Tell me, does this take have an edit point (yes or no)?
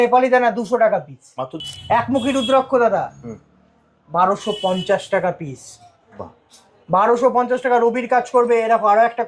yes